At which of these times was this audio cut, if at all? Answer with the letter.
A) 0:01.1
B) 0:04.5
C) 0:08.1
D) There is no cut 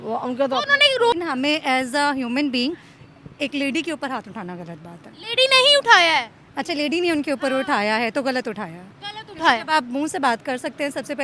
A